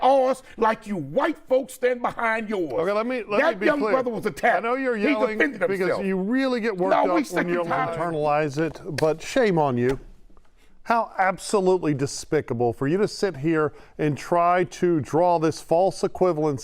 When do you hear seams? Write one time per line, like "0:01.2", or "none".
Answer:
0:07.9